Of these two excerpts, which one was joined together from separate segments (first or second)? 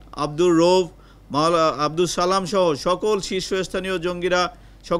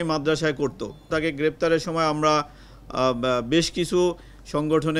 second